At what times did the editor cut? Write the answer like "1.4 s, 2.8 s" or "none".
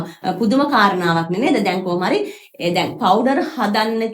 none